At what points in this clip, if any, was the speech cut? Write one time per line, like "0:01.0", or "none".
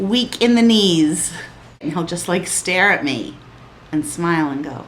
0:01.8